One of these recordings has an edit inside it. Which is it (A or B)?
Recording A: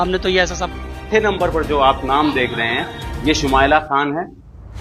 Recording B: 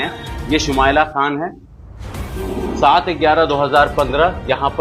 A